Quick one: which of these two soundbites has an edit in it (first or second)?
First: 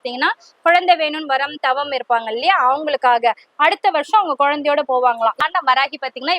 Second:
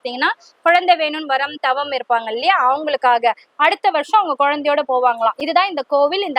first